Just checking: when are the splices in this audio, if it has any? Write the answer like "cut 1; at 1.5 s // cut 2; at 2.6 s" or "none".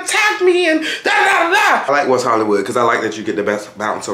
cut 1; at 1.8 s